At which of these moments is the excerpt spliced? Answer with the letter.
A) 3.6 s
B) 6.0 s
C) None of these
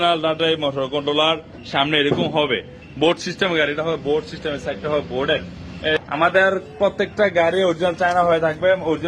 B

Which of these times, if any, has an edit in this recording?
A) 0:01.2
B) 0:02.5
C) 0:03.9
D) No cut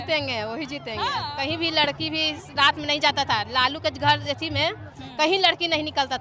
A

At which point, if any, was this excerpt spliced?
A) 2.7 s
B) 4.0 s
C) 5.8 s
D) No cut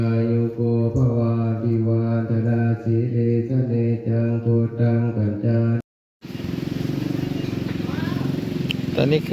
C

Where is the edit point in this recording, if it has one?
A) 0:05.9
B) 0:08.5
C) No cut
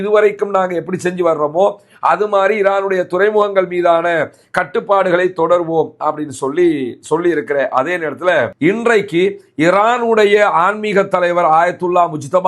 B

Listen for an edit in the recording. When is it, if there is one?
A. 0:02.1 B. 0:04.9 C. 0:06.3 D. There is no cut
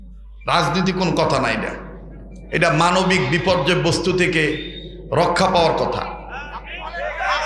D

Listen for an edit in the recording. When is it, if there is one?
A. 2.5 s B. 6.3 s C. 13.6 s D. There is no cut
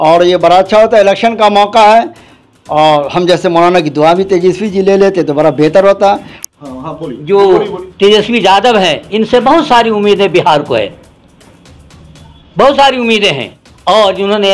B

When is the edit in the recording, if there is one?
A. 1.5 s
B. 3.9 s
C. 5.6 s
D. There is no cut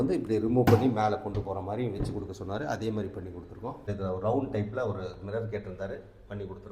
B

